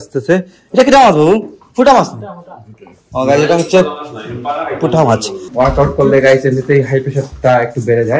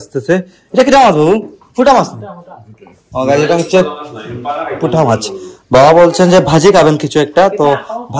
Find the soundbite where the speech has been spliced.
first; 1 cut; at 5.5 s

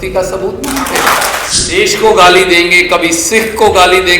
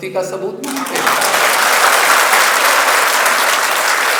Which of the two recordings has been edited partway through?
first; 1 cut; at 1.6 s

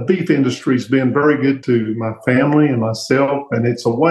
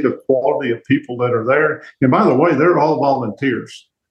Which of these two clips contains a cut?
first; 1 cut; at 1.6 s

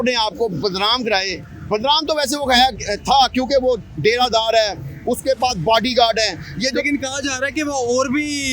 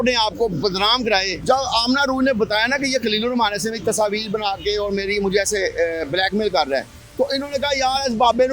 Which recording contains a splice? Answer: second; 1 cut; at 1.3 s

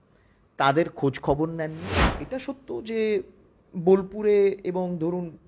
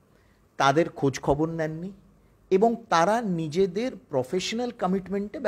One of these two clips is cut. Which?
first; 1 cut; at 2.2 s

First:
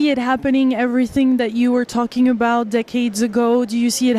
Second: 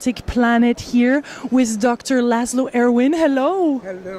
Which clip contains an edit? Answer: second; 1 cut; at 3.1 s

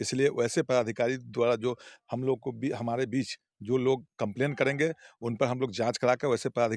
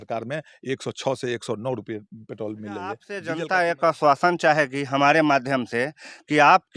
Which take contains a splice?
second; 1 cut; at 3.1 s

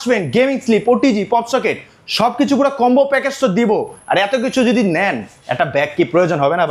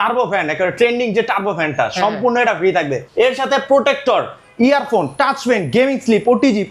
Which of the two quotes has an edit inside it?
second; 1 cut; at 3.0 s

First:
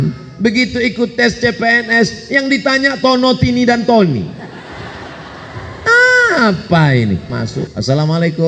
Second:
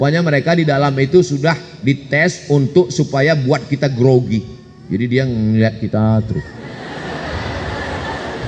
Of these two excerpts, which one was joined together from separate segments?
first; 1 cut; at 7.4 s

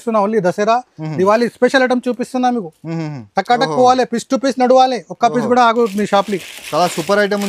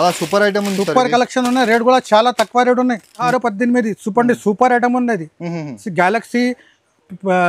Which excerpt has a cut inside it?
second; 1 cut; at 3.3 s

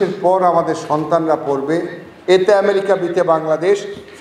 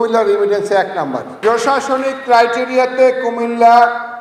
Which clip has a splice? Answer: second; 1 cut; at 1.3 s

